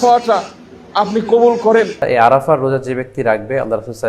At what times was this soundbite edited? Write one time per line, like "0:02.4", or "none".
0:02.1